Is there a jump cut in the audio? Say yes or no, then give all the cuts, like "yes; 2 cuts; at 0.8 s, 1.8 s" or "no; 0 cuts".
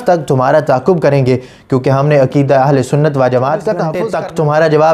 yes; 1 cut; at 4.0 s